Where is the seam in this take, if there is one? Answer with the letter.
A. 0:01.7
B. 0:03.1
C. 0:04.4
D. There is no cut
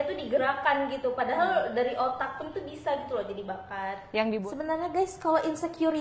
C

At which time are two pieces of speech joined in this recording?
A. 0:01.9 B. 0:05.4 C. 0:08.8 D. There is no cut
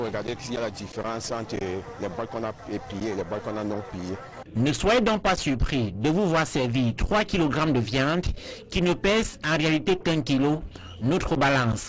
B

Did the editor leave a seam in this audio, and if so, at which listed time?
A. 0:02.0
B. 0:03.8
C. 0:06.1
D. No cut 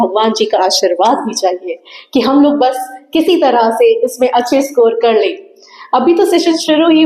D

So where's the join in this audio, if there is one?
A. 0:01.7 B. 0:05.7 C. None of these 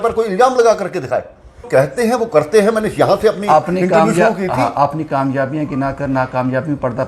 A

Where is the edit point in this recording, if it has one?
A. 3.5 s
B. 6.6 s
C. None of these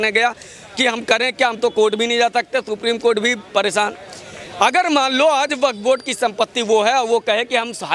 C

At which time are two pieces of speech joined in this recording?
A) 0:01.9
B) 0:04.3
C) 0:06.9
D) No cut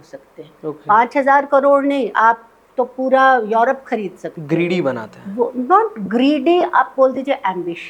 D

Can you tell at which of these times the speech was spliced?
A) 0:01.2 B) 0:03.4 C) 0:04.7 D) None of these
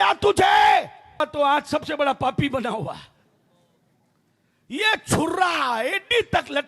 A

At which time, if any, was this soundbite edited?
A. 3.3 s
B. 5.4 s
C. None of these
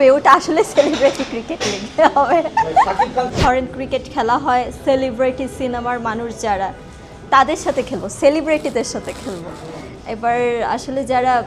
A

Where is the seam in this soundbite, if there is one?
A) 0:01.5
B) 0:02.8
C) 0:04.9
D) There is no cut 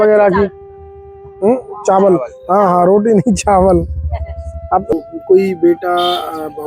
C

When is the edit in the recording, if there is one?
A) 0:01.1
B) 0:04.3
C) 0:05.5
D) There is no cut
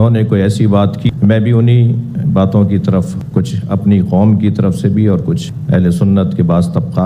A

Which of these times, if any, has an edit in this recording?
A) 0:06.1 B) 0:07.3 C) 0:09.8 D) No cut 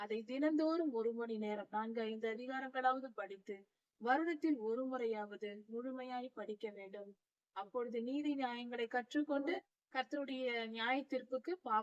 C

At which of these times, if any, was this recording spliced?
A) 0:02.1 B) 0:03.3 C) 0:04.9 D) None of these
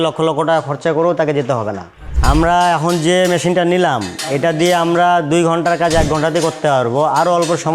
A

